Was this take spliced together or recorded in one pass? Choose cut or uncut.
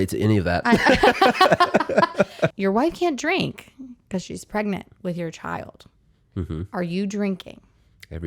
cut